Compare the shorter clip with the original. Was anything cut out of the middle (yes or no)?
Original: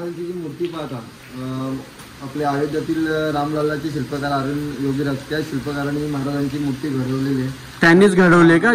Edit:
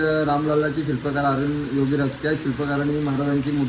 no